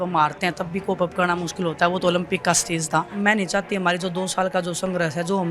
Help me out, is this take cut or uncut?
cut